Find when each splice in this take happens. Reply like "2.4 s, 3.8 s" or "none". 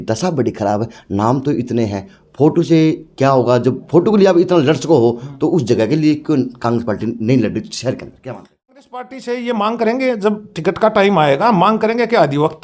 8.8 s